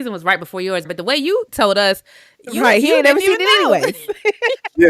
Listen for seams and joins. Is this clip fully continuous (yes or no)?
no